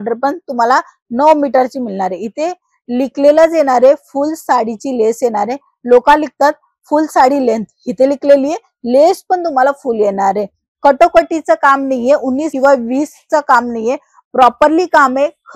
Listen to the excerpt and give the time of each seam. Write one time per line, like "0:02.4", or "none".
none